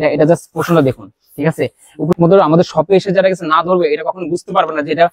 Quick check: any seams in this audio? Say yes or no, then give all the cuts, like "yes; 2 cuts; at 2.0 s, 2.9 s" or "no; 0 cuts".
yes; 1 cut; at 2.1 s